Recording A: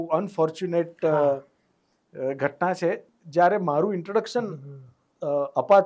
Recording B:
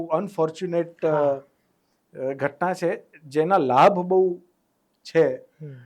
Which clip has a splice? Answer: A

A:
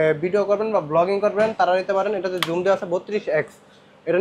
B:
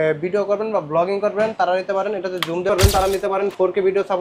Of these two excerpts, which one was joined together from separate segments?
B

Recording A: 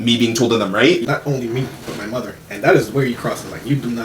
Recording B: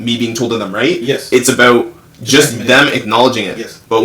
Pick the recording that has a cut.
A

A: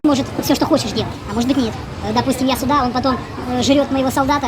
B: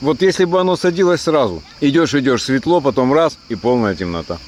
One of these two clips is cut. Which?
A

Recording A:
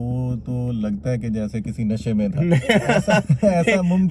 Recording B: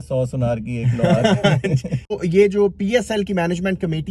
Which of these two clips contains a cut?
B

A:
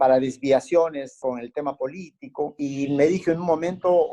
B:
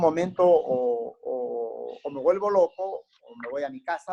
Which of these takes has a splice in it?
A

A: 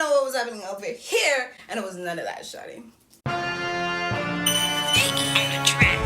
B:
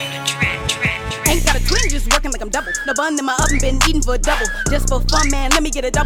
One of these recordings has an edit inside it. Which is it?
A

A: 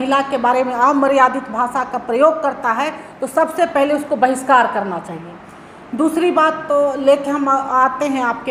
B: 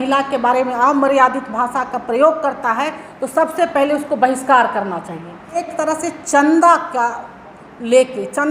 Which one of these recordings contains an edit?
B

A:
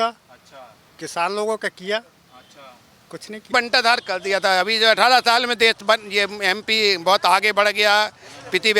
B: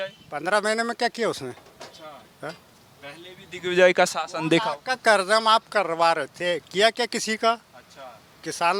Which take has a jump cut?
A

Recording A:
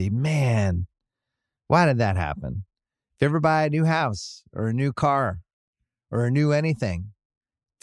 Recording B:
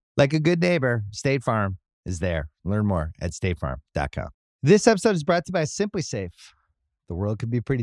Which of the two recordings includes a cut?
B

